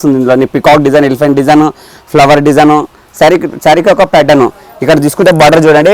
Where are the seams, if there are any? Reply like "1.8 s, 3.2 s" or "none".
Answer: none